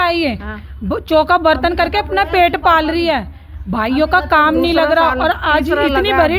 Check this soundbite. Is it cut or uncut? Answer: uncut